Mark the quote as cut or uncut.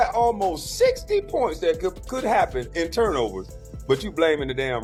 uncut